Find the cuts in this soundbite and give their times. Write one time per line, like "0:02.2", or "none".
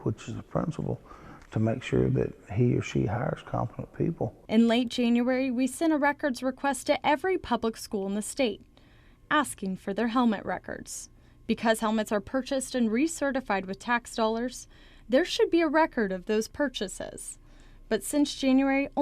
none